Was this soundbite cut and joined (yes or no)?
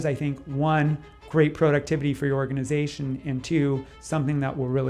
no